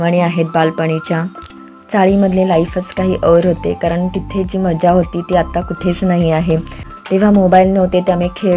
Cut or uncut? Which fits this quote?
cut